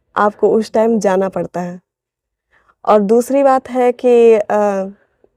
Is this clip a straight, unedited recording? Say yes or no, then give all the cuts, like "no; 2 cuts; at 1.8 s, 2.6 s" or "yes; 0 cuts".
yes; 0 cuts